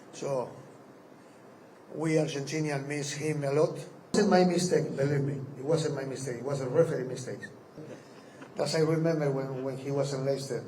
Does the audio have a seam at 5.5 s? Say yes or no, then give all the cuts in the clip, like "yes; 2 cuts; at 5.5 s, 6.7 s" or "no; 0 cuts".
no; 1 cut; at 4.1 s